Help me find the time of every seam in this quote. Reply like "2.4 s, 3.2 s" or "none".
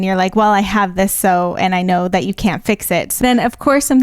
3.1 s

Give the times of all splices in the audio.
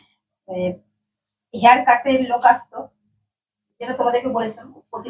none

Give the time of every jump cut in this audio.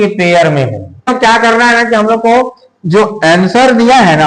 1.1 s

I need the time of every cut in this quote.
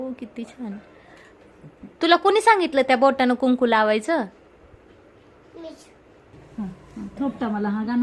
6.3 s

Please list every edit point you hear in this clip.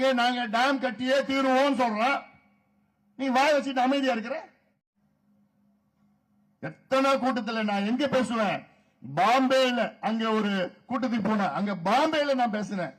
4.9 s

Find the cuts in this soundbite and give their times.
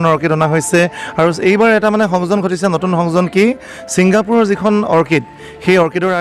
none

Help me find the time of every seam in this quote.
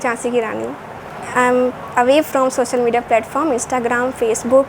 1.2 s

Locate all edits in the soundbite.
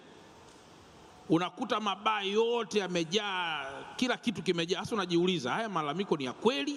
none

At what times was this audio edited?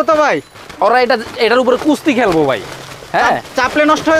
none

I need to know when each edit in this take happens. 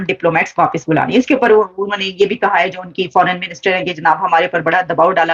none

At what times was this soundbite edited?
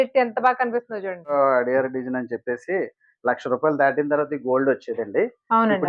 1.3 s

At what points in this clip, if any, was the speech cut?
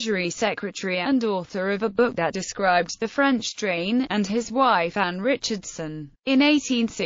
2.9 s

